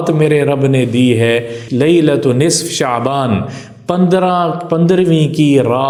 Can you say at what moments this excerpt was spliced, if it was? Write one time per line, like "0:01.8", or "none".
none